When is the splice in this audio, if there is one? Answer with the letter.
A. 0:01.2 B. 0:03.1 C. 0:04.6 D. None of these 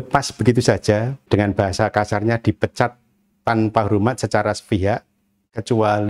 A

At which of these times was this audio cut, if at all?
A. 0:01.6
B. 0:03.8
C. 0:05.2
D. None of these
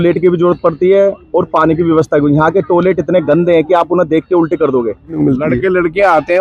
C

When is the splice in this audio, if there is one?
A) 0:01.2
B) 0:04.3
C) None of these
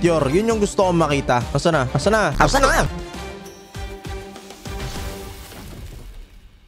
C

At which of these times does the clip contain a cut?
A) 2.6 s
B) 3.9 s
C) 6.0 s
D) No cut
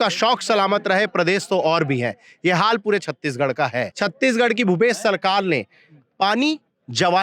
B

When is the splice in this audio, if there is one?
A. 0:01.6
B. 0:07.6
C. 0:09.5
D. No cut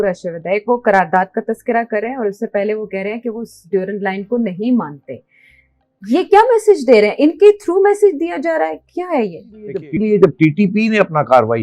C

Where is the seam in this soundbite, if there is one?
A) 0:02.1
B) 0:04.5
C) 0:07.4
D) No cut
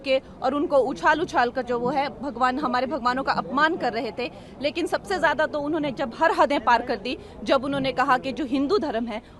D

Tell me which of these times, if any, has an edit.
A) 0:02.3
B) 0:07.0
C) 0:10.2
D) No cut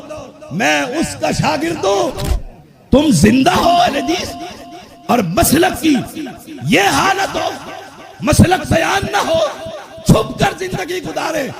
A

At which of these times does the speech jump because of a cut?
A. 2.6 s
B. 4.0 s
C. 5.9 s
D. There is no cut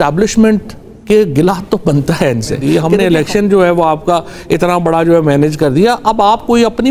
A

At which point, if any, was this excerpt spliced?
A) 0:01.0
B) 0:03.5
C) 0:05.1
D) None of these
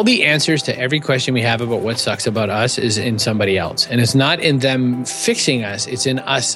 C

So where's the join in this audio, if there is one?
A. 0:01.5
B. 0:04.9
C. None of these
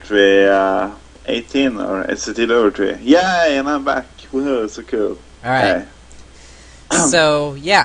C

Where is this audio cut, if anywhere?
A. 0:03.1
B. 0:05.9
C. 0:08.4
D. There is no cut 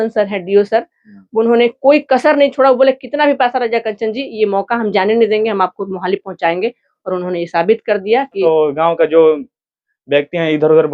C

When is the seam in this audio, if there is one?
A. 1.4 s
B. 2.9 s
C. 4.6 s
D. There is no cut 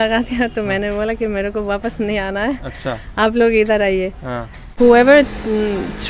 C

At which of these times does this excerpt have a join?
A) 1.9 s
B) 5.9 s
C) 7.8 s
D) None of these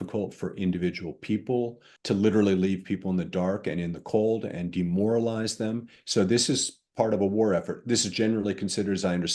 A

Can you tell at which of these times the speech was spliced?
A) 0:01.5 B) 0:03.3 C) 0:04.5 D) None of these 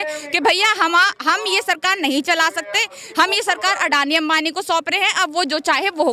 D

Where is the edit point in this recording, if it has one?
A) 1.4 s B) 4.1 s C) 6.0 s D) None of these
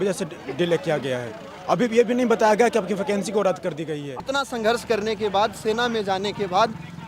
B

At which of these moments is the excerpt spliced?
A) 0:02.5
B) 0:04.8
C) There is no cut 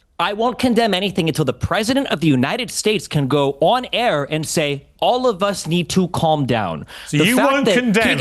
A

